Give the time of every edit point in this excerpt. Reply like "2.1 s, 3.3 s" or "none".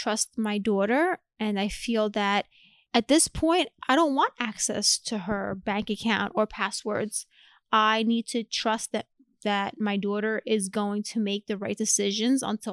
2.8 s